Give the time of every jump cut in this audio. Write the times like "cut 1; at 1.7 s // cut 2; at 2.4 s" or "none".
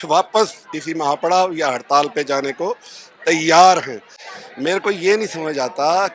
none